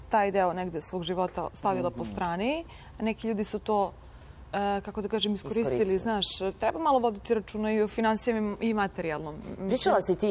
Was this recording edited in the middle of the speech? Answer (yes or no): no